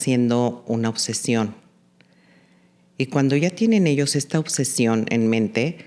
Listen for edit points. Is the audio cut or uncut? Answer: uncut